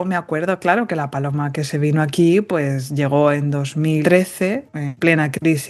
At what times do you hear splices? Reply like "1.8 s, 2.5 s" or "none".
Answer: 4.0 s, 4.8 s